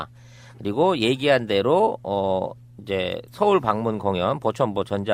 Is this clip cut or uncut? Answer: uncut